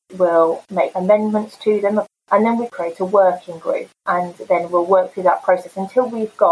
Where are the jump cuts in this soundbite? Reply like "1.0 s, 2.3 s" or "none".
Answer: 1.0 s, 4.0 s